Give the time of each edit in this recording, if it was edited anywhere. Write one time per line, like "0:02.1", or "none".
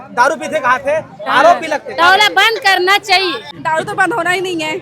0:03.5